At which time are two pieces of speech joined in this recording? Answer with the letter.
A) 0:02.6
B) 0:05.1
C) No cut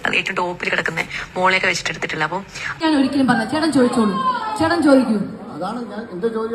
A